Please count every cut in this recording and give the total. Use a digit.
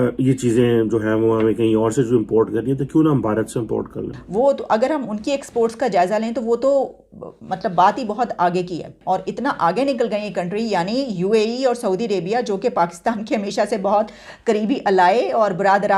2